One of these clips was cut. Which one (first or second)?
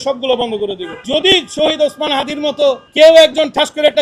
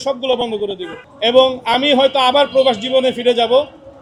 first